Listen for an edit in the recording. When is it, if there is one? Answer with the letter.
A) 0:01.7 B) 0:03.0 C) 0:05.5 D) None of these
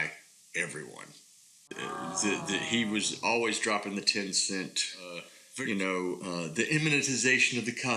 A